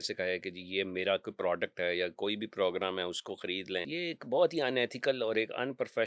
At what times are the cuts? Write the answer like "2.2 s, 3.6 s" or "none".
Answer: 3.9 s